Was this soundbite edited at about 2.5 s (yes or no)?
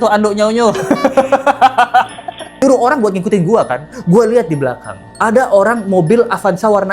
yes